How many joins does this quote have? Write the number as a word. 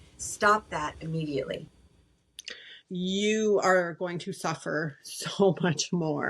one